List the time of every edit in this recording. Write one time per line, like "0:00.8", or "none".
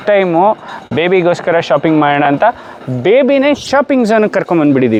none